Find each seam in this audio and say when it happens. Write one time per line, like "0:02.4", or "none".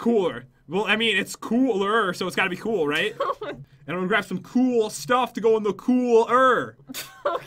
0:03.5